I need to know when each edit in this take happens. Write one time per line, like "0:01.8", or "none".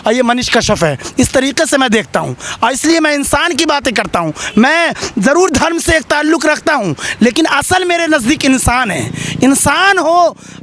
none